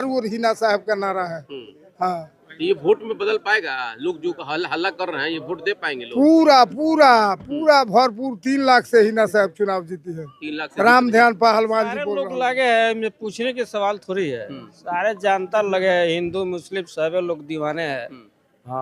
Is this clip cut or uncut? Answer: cut